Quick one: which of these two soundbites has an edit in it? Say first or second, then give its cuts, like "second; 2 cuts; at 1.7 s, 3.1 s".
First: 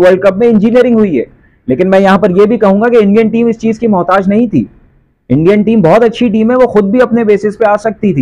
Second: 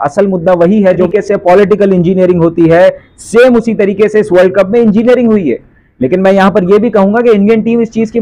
second; 1 cut; at 1.1 s